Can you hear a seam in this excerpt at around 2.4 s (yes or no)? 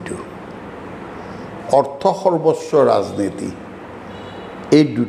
no